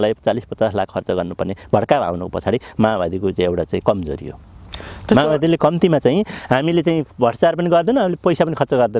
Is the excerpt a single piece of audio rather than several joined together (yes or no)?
yes